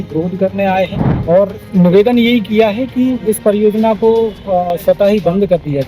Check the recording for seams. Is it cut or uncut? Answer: cut